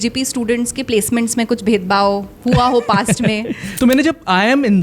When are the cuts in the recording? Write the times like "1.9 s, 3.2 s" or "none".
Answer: 3.6 s